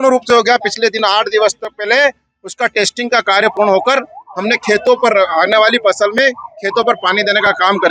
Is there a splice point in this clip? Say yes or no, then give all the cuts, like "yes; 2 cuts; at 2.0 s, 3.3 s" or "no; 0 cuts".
no; 0 cuts